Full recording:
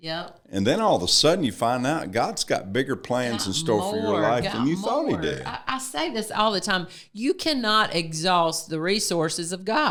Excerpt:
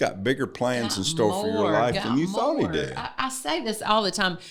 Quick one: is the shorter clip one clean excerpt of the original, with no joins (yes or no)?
yes